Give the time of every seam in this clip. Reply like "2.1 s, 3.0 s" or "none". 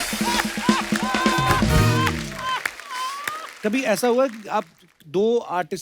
3.4 s